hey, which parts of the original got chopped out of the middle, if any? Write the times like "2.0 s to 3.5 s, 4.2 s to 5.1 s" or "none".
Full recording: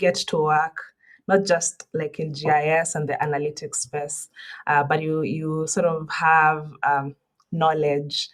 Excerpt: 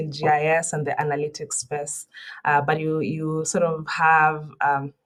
none